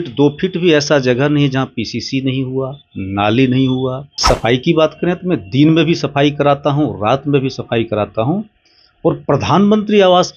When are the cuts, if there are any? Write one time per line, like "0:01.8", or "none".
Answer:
0:04.1